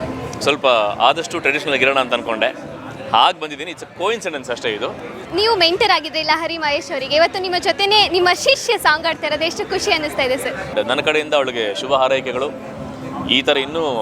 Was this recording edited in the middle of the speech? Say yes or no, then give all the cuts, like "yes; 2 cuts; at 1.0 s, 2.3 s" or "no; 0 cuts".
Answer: yes; 2 cuts; at 5.2 s, 10.7 s